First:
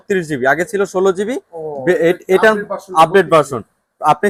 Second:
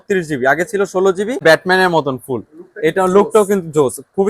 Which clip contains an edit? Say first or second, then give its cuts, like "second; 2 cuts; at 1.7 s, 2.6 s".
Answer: second; 1 cut; at 1.4 s